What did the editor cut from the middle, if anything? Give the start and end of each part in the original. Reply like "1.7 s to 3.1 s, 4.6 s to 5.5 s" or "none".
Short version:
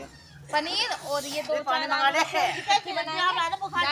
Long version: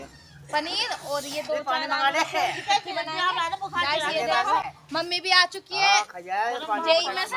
none